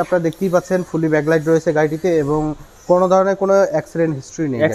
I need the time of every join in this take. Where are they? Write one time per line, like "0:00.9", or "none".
none